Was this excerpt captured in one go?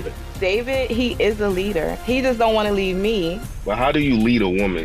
yes; 0 cuts

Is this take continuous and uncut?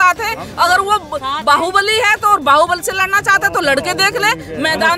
yes; 0 cuts

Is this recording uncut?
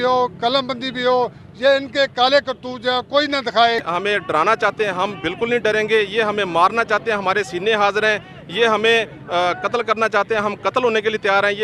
no; 1 cut; at 3.9 s

